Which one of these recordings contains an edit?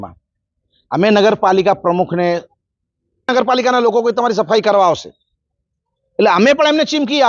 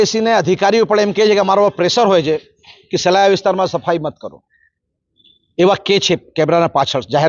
first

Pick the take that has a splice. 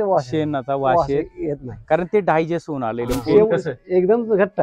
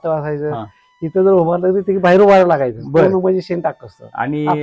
first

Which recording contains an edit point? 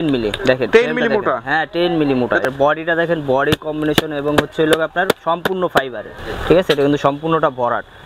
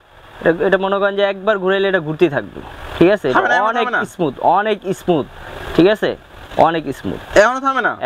first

